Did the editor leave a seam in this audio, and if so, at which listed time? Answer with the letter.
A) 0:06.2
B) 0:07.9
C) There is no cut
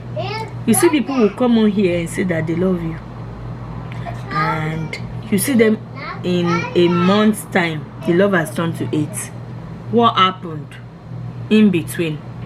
B